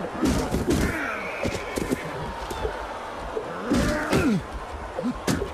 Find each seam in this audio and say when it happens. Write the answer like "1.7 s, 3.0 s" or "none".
none

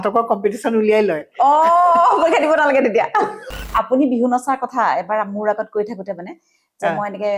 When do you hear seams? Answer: 3.5 s

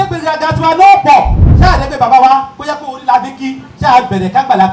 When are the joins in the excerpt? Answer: 1.4 s, 3.7 s

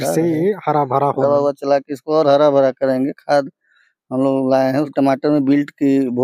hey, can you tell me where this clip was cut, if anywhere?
1.2 s, 4.9 s

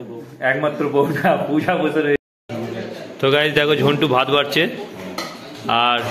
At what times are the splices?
2.2 s

